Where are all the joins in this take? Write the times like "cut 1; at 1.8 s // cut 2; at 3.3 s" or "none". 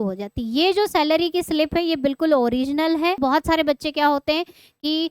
cut 1; at 3.2 s